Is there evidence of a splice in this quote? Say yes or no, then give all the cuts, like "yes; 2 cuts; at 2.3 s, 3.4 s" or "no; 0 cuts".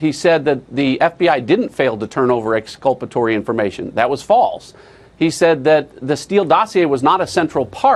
no; 0 cuts